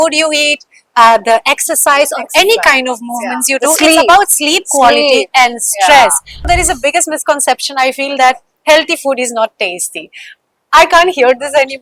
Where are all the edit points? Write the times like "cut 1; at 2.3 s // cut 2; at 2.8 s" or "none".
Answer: cut 1; at 6.5 s